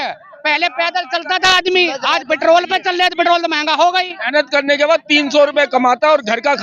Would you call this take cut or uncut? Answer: uncut